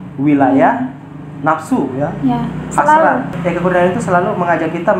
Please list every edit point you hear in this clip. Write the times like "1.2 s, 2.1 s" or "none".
none